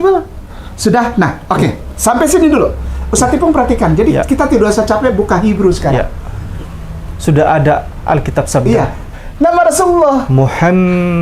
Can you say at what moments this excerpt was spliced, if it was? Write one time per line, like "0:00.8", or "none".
0:09.1